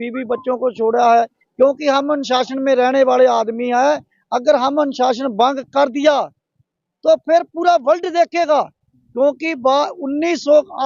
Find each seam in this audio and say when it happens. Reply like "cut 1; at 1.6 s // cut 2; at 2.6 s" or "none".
cut 1; at 1.4 s